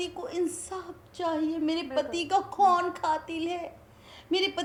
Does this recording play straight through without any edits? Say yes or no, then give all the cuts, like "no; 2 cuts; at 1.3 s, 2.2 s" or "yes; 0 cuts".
yes; 0 cuts